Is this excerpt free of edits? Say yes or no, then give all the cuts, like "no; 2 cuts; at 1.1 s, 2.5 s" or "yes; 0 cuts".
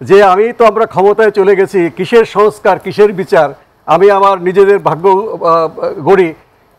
yes; 0 cuts